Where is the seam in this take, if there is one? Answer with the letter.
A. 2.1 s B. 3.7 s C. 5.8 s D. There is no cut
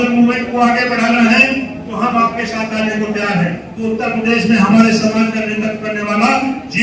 B